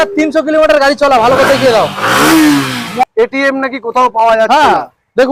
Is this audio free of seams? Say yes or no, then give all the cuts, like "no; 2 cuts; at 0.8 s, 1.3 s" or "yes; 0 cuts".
no; 1 cut; at 3.0 s